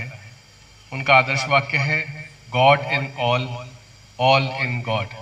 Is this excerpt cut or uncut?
uncut